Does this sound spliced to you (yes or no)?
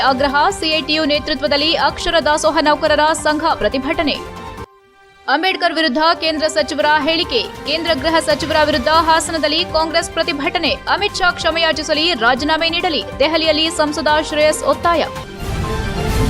yes